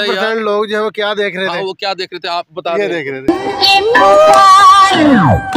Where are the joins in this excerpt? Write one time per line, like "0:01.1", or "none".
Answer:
none